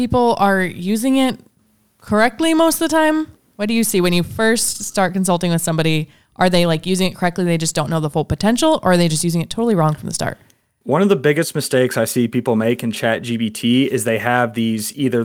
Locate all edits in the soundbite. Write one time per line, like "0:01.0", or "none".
0:03.4